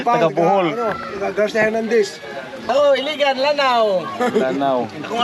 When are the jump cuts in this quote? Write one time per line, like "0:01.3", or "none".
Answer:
0:02.6